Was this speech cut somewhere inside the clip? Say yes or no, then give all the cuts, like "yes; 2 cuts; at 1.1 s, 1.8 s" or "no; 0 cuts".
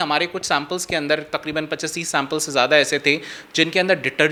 no; 0 cuts